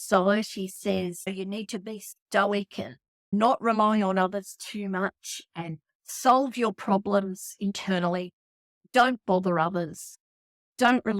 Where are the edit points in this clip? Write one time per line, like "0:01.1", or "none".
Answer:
0:01.3
0:03.3